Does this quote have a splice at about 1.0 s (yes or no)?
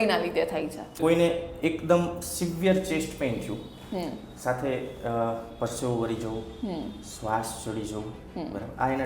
yes